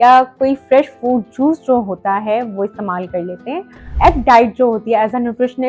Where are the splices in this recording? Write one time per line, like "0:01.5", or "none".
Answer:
0:03.9

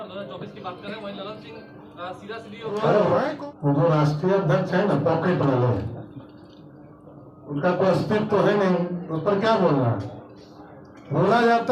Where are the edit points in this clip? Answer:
0:03.1

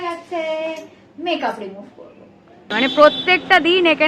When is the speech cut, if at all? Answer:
0:02.6

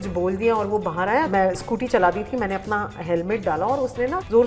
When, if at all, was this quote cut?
none

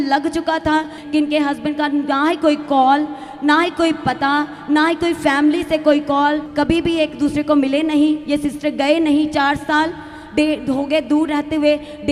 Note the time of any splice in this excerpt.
0:01.0
0:06.5

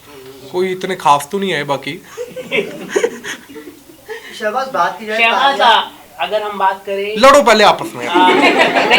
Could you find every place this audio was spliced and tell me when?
none

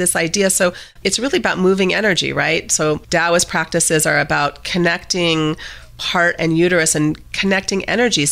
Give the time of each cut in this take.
0:01.0
0:03.0
0:06.0

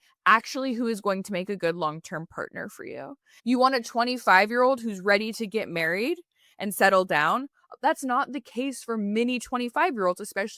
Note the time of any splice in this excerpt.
0:03.2

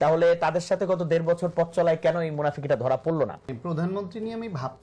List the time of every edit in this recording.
0:03.5

